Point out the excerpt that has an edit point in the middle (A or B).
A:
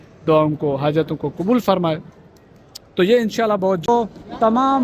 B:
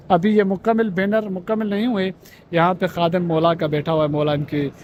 A